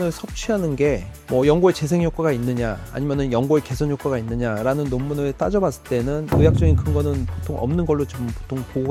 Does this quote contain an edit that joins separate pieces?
no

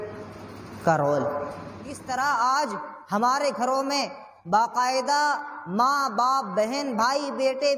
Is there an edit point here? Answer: yes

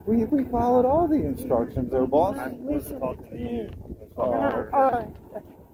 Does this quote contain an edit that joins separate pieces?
no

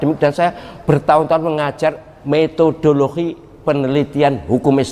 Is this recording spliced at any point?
yes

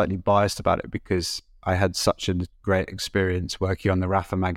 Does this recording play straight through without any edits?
yes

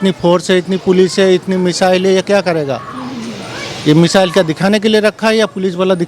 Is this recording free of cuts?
yes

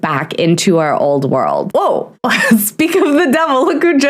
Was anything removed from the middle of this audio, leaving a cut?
yes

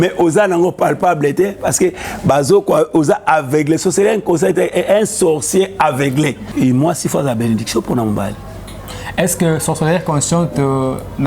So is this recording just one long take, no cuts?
no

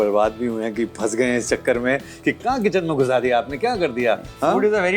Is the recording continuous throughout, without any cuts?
yes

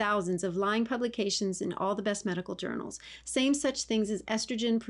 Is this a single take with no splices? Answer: yes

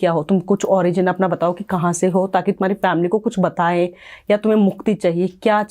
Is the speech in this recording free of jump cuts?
yes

